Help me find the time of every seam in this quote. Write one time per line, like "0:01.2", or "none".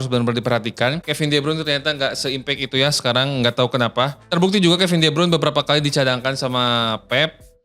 0:01.1
0:04.2